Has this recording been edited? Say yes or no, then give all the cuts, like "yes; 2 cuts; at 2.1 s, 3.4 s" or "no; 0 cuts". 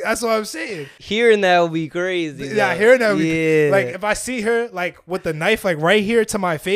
yes; 1 cut; at 1.0 s